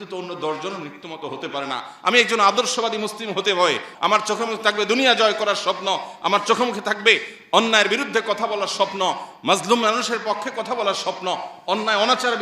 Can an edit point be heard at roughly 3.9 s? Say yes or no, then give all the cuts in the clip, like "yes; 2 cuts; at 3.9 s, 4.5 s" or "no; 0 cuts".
yes; 1 cut; at 3.9 s